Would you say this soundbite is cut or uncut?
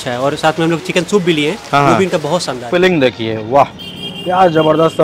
cut